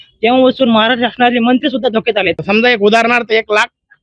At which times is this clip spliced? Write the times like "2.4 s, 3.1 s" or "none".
2.4 s